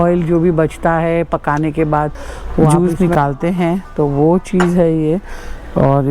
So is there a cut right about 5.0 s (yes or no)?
no